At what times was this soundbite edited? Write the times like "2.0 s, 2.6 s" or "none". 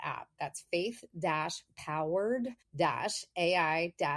2.6 s